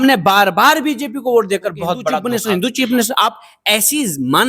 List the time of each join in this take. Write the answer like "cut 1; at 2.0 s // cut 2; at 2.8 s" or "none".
cut 1; at 2.2 s